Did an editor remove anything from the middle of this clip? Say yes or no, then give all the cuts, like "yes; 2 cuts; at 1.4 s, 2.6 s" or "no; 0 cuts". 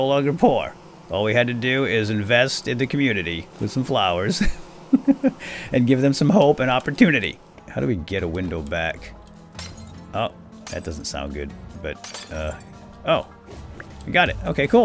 yes; 2 cuts; at 7.6 s, 11.6 s